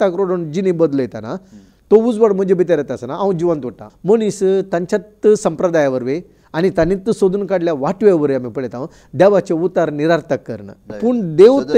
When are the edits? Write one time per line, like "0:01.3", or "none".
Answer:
0:03.9
0:10.9